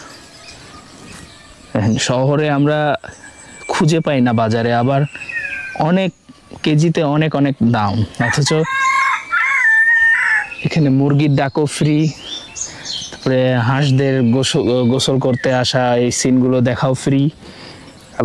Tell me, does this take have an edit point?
no; 0 cuts

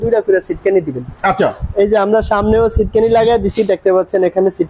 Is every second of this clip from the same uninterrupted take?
yes; 0 cuts

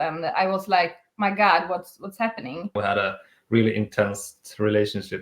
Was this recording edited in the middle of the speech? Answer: yes; 1 cut; at 2.7 s

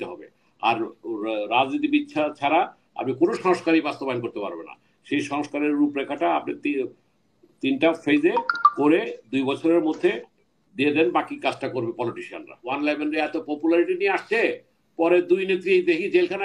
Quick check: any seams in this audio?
yes; 1 cut; at 12.6 s

